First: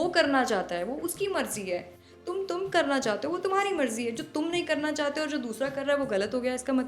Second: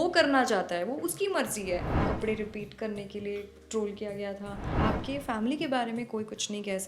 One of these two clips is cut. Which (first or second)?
second